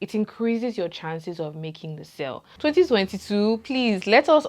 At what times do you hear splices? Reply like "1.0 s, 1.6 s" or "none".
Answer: 2.5 s